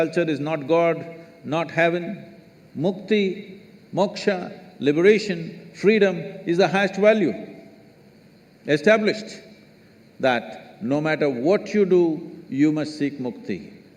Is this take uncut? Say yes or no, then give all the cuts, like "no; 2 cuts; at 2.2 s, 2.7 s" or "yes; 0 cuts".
yes; 0 cuts